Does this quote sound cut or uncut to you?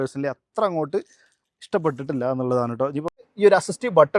cut